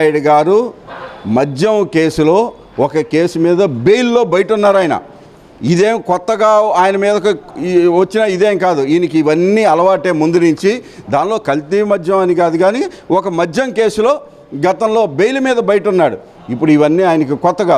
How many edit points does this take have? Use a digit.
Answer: 0